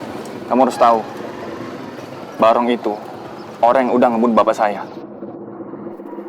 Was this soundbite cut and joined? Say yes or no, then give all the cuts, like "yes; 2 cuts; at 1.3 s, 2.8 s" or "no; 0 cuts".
no; 0 cuts